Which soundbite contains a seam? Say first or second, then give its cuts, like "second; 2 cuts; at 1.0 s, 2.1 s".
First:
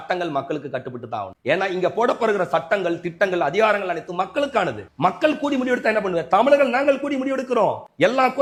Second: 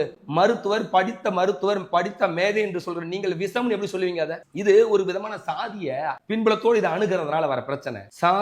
second; 1 cut; at 6.2 s